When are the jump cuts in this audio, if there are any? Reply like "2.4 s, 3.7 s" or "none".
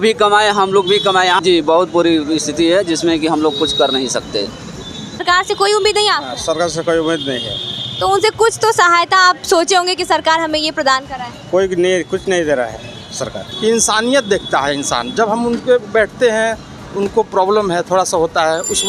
1.4 s, 5.2 s, 13.5 s